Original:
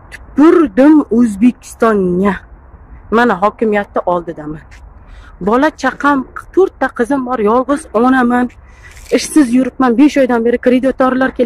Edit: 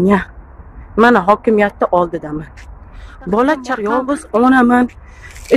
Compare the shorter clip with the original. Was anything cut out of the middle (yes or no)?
yes